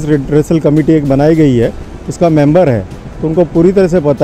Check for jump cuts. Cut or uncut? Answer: uncut